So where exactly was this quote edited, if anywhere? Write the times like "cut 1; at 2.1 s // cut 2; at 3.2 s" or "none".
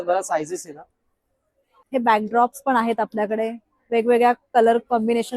cut 1; at 1.8 s

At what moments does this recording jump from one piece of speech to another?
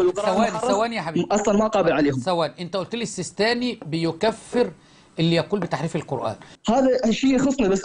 cut 1; at 6.5 s

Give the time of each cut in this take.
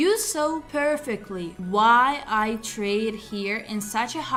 none

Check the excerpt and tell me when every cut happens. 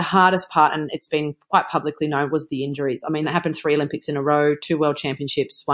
cut 1; at 3.3 s

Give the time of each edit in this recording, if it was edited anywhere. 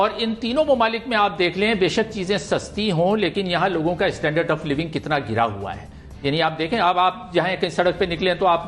none

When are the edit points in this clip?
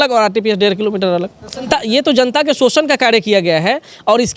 cut 1; at 1.7 s

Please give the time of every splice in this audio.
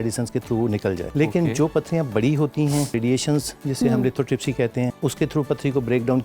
cut 1; at 1.1 s // cut 2; at 3.0 s // cut 3; at 4.9 s

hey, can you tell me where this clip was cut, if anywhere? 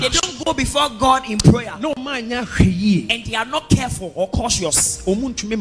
none

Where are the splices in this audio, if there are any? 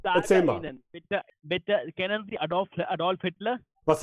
cut 1; at 1.3 s

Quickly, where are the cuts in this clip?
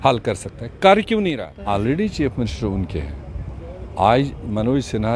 cut 1; at 1.5 s

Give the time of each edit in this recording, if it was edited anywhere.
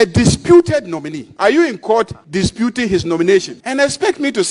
cut 1; at 1.2 s // cut 2; at 2.2 s // cut 3; at 3.6 s

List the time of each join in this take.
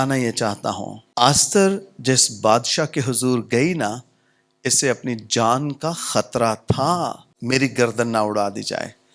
cut 1; at 1.0 s // cut 2; at 7.3 s

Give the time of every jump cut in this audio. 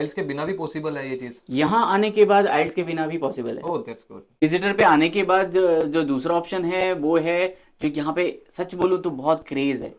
cut 1; at 4.2 s

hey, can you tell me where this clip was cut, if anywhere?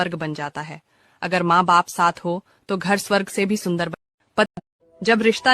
cut 1; at 4.5 s

